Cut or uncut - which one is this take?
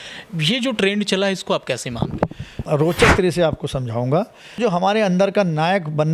cut